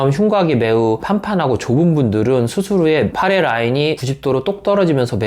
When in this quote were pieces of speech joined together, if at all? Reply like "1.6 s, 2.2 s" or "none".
none